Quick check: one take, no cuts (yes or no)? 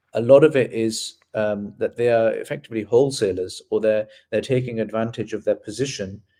yes